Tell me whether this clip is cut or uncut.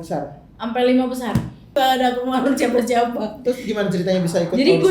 cut